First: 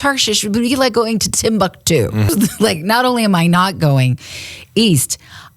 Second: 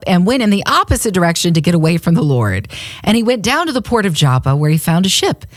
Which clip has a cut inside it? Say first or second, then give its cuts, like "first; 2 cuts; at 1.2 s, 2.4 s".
first; 1 cut; at 2.3 s